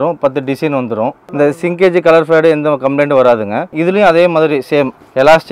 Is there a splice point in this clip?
yes; 2 cuts; at 1.2 s, 3.7 s

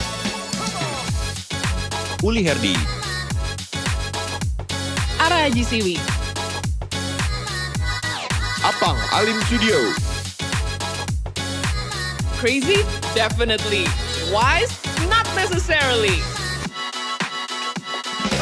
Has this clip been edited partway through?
no; 0 cuts

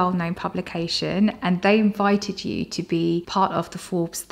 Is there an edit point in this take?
yes; 1 cut; at 3.3 s

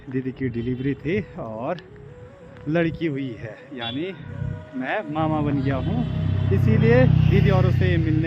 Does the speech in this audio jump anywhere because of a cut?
no; 0 cuts

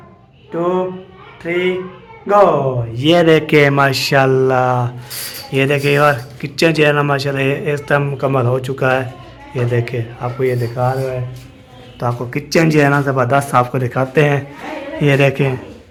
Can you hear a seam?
no; 0 cuts

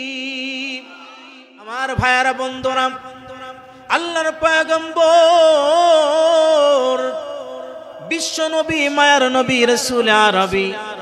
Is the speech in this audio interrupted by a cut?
yes; 1 cut; at 1.8 s

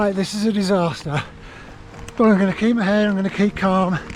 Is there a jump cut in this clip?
no; 0 cuts

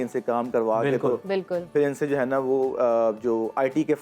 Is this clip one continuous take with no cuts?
yes; 0 cuts

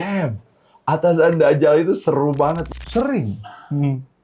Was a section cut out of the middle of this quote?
yes; 1 cut; at 2.6 s

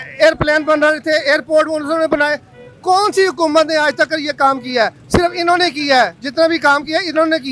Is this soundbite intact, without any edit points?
yes; 0 cuts

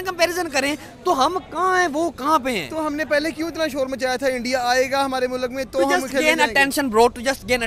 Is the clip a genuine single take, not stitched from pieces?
yes; 0 cuts

